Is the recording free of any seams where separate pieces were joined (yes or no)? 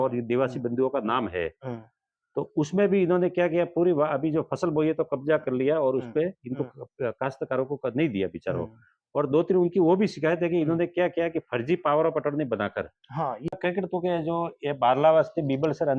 no